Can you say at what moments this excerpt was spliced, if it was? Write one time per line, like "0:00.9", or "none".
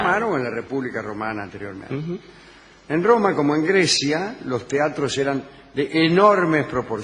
0:06.0